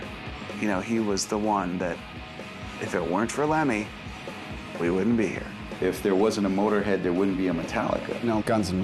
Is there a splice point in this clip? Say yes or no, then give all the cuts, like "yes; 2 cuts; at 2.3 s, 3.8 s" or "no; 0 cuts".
no; 0 cuts